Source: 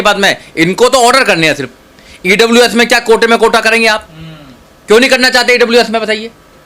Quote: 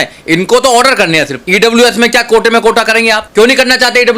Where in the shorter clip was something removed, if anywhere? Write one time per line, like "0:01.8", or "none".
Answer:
0:01.4
0:03.2